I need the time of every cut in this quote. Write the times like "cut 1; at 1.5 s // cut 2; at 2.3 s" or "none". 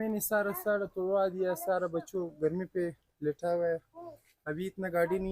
none